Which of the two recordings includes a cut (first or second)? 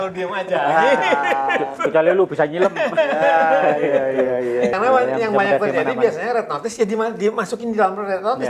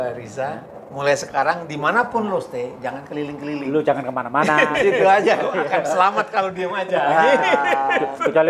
first